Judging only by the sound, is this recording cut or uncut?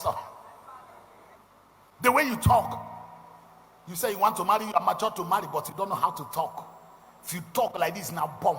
cut